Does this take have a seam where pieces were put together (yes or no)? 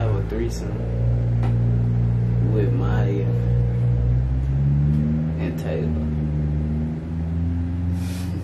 no